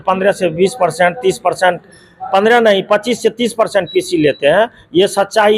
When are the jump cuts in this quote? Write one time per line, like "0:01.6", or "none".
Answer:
none